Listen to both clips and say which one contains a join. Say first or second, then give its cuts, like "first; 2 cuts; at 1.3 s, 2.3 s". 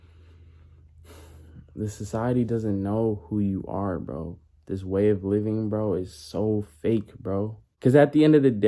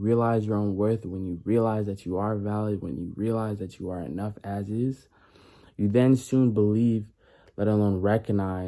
first; 1 cut; at 7.6 s